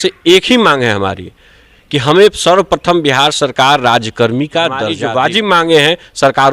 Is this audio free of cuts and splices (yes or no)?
no